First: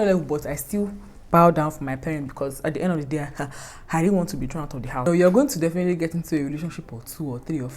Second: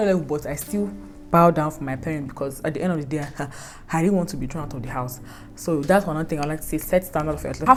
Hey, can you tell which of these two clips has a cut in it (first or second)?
first